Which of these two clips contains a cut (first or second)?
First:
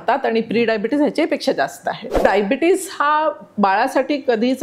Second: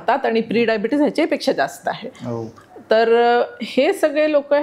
first